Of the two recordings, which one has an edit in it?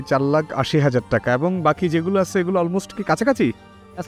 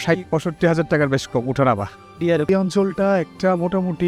second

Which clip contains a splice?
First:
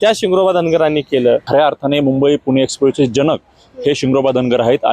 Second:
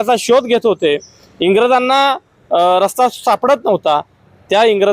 first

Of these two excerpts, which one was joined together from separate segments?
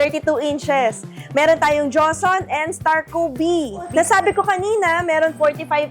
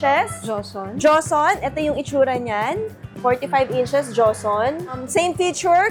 first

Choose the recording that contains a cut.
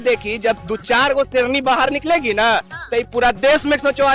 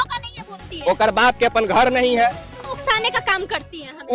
second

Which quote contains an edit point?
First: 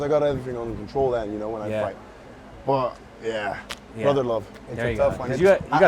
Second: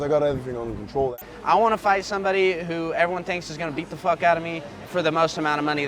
second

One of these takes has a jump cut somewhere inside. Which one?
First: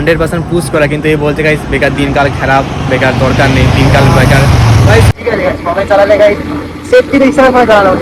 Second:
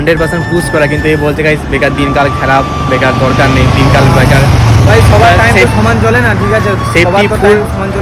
first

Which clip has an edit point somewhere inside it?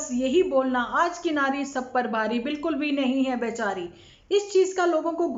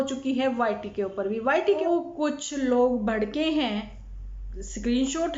second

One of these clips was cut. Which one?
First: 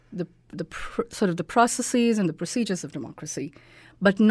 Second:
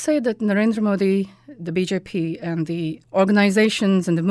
second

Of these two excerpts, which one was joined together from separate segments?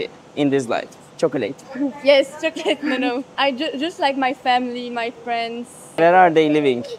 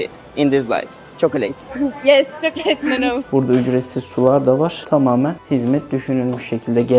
second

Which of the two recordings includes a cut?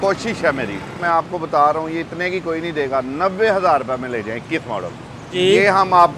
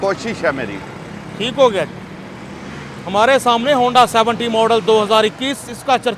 first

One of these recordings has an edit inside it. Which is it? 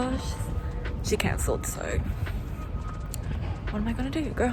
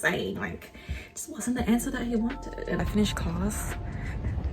second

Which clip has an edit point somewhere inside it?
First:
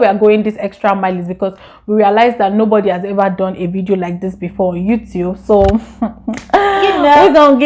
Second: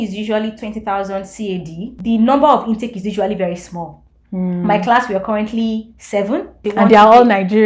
second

